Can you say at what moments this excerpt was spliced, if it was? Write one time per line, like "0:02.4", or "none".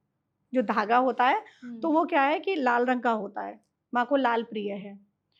none